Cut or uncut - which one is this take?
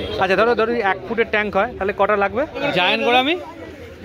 cut